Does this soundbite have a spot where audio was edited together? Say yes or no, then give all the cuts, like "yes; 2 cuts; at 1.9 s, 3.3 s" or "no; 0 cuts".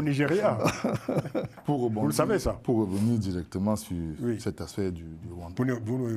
no; 0 cuts